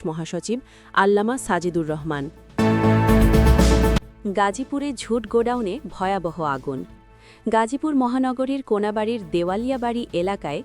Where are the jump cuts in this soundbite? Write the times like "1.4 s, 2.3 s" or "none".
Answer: 2.4 s, 4.0 s